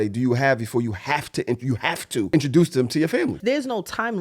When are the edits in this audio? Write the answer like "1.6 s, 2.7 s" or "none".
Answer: 2.3 s, 3.4 s